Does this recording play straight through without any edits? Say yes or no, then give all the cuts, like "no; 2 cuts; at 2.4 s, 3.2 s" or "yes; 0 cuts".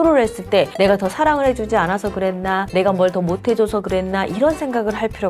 yes; 0 cuts